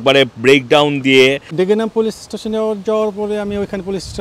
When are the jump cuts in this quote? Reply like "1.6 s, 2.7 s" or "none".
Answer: 1.5 s